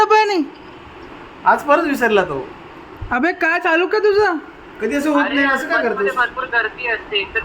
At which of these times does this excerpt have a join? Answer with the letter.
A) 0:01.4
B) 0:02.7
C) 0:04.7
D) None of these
D